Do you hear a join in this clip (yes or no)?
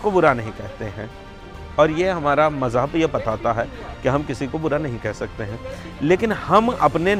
no